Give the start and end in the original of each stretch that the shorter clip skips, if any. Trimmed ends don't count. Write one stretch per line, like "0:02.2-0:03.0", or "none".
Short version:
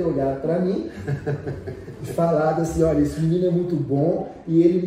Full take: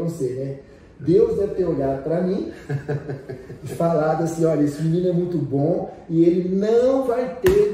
none